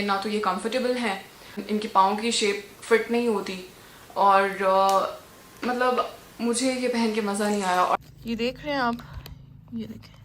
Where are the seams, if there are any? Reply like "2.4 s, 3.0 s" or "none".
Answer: 1.6 s, 8.0 s